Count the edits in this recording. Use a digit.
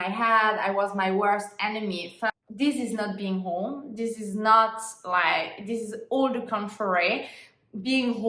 1